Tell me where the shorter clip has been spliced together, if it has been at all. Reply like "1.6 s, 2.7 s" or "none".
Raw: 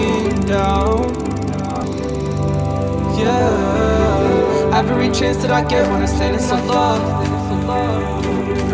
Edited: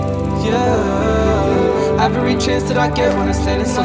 none